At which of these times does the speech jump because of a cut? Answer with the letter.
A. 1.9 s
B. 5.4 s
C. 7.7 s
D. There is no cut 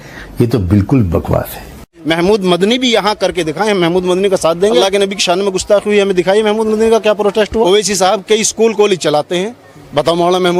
A